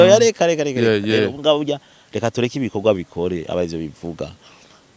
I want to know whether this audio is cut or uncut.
uncut